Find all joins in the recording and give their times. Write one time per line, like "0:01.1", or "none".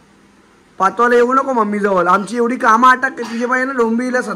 none